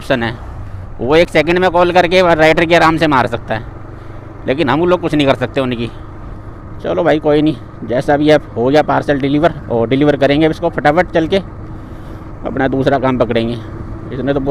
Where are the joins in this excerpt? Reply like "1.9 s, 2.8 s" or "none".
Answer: none